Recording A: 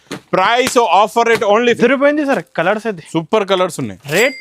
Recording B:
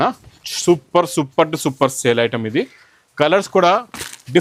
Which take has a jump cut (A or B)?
A